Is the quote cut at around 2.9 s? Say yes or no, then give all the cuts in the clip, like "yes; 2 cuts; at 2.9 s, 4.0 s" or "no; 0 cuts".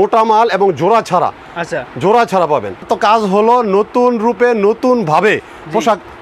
yes; 1 cut; at 2.9 s